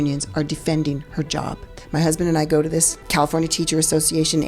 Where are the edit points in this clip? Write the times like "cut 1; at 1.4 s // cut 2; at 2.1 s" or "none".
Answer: cut 1; at 1.8 s // cut 2; at 3.0 s